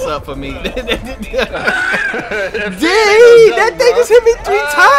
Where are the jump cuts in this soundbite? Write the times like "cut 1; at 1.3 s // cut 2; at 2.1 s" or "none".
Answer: none